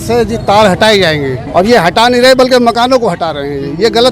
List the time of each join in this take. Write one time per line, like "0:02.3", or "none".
0:01.4